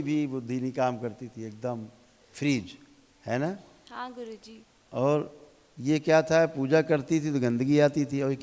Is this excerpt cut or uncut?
uncut